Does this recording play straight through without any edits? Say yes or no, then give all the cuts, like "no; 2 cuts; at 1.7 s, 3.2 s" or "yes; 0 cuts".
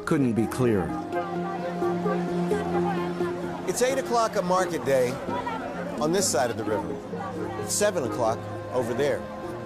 yes; 0 cuts